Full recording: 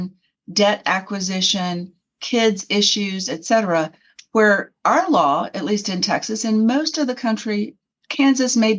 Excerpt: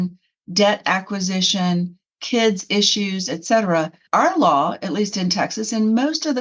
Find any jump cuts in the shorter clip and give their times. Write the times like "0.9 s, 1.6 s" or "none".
4.0 s